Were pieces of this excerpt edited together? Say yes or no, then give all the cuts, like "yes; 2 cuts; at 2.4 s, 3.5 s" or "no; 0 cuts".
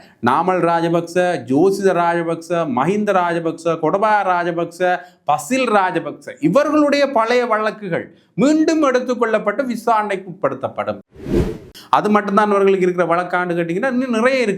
yes; 1 cut; at 11.3 s